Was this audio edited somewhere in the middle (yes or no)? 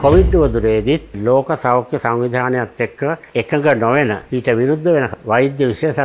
yes